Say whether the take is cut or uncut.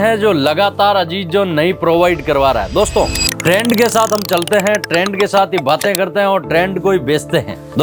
uncut